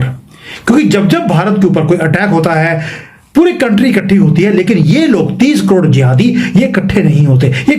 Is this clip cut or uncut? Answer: uncut